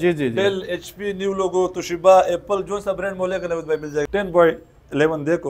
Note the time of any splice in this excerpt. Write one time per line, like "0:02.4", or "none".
0:04.1